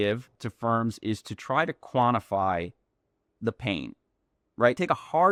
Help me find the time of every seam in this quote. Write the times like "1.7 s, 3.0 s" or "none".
none